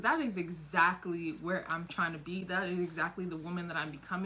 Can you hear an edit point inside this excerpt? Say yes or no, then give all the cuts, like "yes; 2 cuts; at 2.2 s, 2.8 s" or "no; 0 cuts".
no; 0 cuts